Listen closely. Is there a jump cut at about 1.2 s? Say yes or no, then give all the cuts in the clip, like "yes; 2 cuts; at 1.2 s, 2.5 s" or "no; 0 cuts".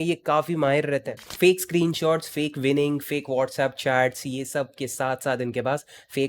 yes; 1 cut; at 1.2 s